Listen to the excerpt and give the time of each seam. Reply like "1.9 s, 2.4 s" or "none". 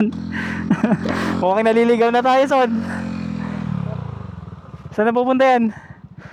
none